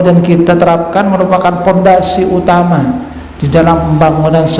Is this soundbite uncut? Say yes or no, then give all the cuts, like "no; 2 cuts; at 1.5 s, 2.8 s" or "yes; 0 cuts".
yes; 0 cuts